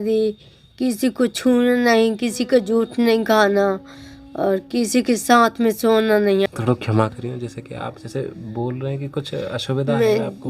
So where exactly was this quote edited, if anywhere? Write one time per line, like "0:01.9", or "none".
0:06.5